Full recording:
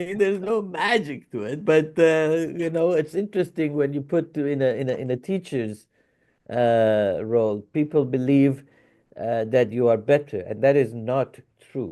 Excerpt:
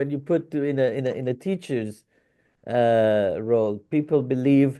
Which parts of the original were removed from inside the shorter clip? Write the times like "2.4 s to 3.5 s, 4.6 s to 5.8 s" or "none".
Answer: none